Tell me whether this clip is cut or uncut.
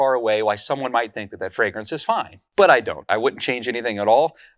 cut